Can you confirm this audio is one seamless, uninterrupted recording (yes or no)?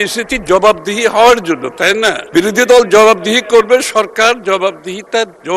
no